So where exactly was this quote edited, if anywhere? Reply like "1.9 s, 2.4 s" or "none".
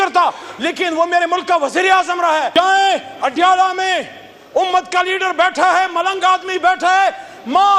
2.5 s